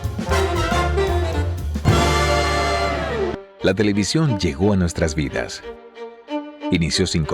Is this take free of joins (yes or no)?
no